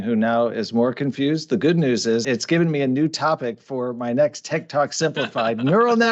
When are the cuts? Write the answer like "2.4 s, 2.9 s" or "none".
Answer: 2.2 s